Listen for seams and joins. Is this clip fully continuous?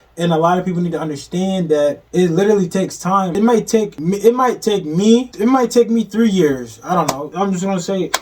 no; 4 cuts; at 2.0 s, 3.6 s, 5.3 s, 7.3 s

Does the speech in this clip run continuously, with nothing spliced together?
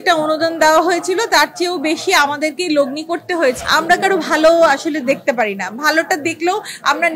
no; 1 cut; at 3.6 s

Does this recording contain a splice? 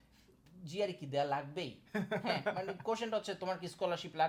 no; 0 cuts

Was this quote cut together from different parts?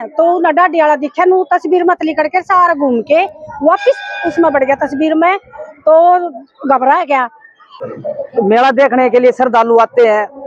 yes; 1 cut; at 7.7 s

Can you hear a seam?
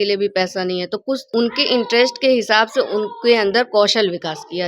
yes; 1 cut; at 1.2 s

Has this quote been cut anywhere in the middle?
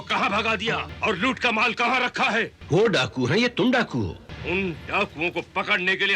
yes; 3 cuts; at 0.9 s, 2.6 s, 4.3 s

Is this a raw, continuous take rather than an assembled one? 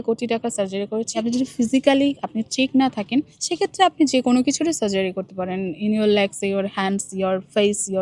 no; 2 cuts; at 1.2 s, 3.4 s

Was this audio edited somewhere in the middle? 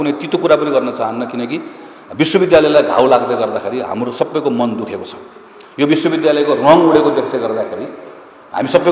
no; 0 cuts

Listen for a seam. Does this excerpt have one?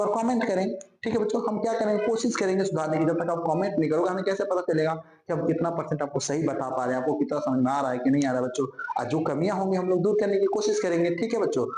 no; 0 cuts

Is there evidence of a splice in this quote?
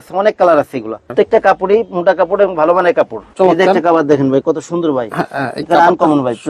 yes; 2 cuts; at 1.1 s, 3.2 s

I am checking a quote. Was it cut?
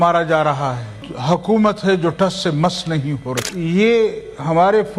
yes; 2 cuts; at 1.1 s, 3.5 s

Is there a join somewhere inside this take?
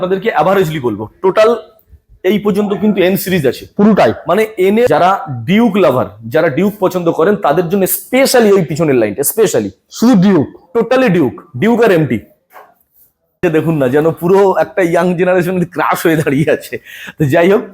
yes; 2 cuts; at 4.9 s, 13.4 s

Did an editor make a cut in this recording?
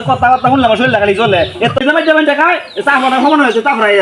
yes; 1 cut; at 1.8 s

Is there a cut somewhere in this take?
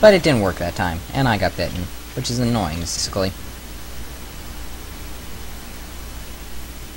no; 0 cuts

